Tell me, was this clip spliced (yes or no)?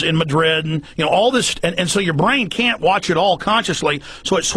no